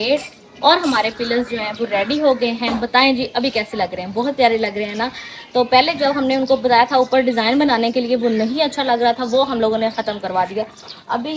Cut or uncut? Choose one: uncut